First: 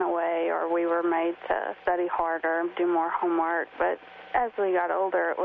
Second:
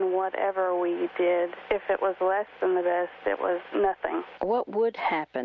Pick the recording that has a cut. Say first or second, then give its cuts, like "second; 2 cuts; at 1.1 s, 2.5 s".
second; 1 cut; at 1.6 s